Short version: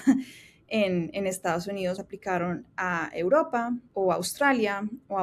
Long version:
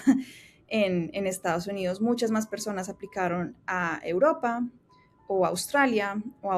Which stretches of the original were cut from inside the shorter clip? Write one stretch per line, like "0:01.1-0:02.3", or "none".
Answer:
0:02.0-0:02.9
0:04.7-0:05.2